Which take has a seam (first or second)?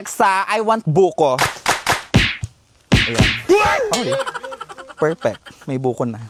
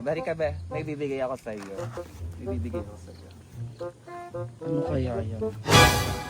second